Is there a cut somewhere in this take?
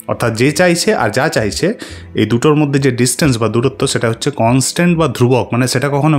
no; 0 cuts

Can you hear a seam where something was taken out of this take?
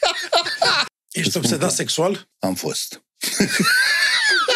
yes; 2 cuts; at 0.8 s, 2.3 s

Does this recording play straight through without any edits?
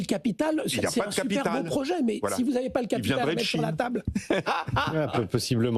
yes; 0 cuts

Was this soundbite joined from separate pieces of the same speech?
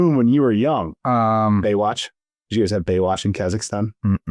yes; 1 cut; at 0.9 s

